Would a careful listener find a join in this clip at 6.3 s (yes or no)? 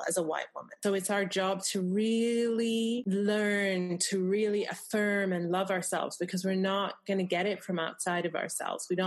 no